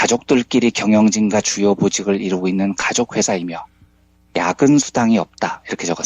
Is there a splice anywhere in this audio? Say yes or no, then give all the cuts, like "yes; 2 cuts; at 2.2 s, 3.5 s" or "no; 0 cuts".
no; 0 cuts